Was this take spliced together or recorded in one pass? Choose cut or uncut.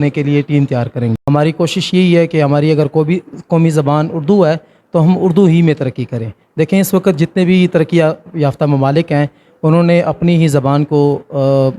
cut